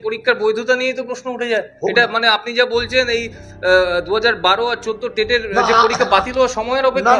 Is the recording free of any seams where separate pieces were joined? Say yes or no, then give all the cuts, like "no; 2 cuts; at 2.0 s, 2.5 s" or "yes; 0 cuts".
yes; 0 cuts